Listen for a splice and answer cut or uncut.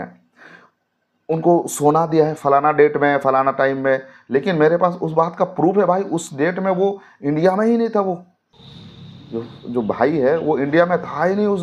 uncut